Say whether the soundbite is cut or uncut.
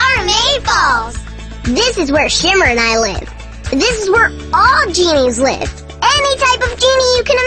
uncut